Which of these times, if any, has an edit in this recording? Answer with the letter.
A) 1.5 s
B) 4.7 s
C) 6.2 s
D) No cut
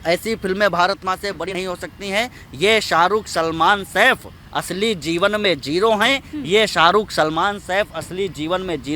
A